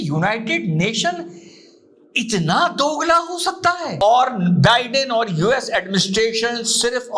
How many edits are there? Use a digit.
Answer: 1